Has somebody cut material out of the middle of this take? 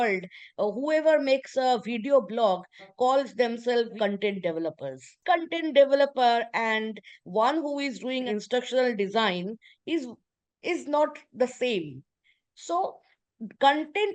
yes; 1 cut; at 5.2 s

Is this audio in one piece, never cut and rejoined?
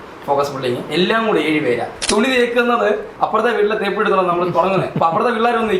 no; 2 cuts; at 2.0 s, 3.1 s

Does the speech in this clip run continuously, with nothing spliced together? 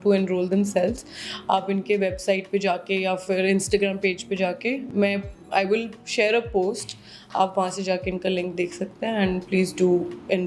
yes; 0 cuts

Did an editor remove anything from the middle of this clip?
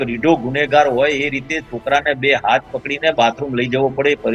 no; 0 cuts

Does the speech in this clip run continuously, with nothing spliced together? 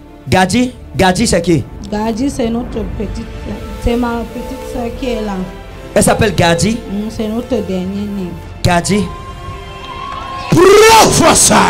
no; 1 cut; at 1.7 s

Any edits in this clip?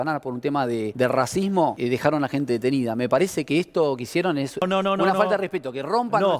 yes; 3 cuts; at 0.9 s, 1.8 s, 4.6 s

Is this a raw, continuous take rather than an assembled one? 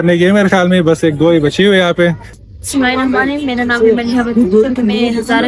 no; 1 cut; at 2.3 s

